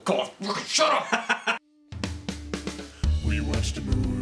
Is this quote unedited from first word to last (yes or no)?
no